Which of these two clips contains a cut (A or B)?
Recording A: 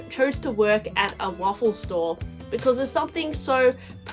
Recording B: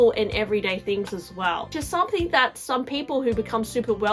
B